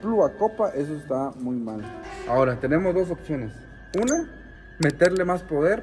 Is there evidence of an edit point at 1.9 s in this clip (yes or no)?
yes